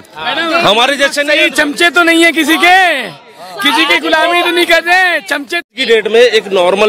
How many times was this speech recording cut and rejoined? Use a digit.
1